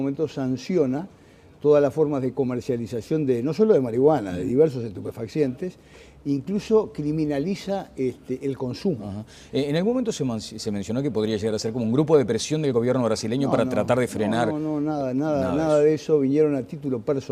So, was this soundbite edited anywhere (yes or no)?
yes